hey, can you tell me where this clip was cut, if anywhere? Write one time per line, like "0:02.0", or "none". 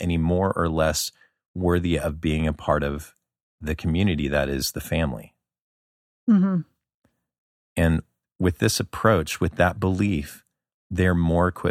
0:08.2